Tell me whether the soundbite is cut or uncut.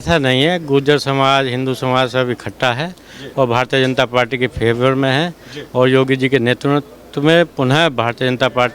uncut